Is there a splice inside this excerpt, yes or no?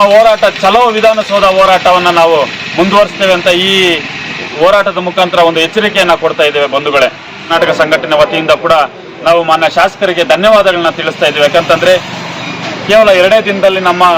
yes